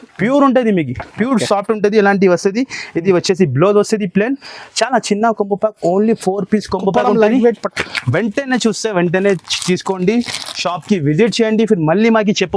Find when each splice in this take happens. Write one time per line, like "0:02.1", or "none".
none

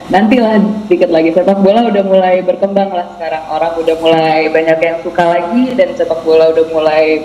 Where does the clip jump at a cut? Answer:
none

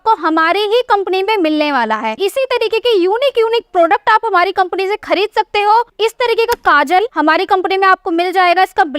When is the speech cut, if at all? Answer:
0:02.2
0:05.9
0:07.1

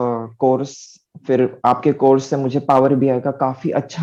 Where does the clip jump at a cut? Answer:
none

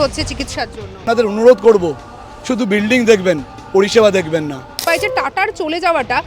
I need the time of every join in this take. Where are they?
0:01.0
0:04.9

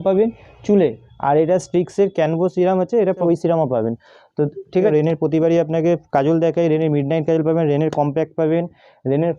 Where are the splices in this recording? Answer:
0:03.2
0:04.9

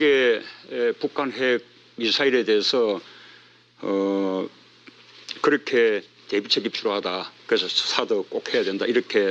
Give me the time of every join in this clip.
0:06.9

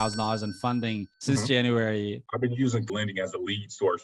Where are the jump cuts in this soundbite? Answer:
0:02.2

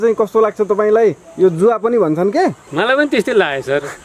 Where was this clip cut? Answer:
0:02.6

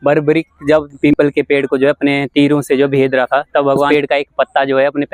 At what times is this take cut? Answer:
0:00.9
0:03.9

